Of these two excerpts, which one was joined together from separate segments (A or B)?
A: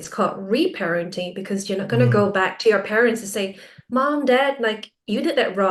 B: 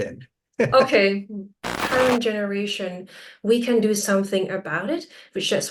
B